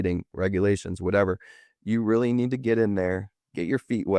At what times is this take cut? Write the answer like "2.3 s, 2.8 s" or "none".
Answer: none